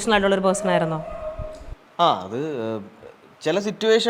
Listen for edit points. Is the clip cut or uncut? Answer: uncut